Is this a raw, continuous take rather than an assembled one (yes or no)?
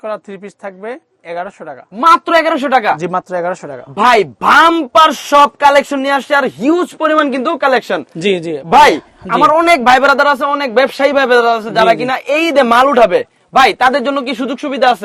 yes